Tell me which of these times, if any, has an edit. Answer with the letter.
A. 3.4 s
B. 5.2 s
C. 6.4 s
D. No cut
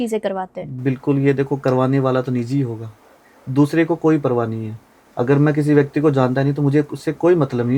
D